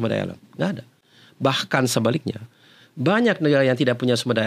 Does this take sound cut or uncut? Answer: uncut